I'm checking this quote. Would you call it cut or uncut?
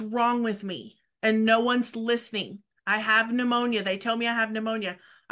uncut